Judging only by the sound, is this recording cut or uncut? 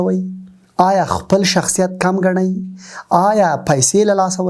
uncut